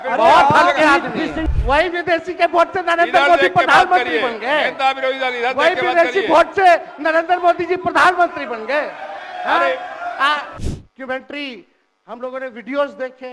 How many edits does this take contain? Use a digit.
2